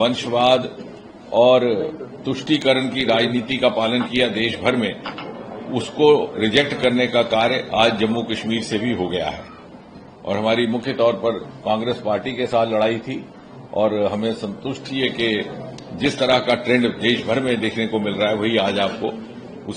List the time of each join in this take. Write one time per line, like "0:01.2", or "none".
none